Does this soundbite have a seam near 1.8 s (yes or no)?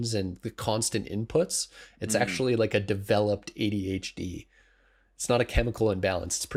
no